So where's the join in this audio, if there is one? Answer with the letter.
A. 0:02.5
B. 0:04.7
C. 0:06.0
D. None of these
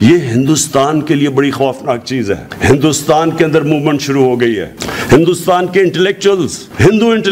A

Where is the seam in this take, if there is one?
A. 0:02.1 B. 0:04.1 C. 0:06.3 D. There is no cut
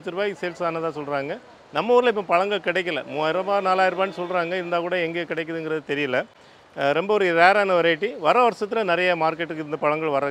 D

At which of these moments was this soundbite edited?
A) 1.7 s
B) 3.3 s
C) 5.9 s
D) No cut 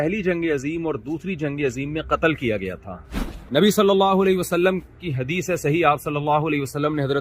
B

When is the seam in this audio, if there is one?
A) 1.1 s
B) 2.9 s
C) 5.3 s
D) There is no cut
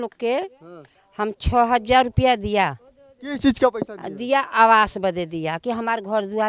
D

